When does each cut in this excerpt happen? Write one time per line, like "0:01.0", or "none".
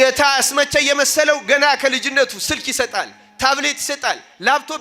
none